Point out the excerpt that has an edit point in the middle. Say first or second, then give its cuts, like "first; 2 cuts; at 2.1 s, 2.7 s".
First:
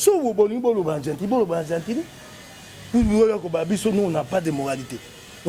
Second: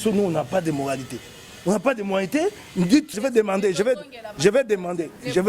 second; 1 cut; at 3.2 s